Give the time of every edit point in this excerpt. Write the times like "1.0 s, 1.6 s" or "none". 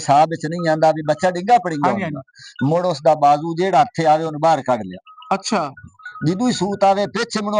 none